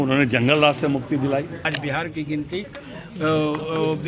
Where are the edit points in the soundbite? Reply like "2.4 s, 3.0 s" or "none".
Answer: 1.7 s